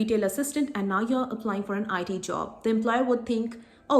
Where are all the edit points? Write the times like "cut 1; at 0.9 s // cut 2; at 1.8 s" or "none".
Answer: none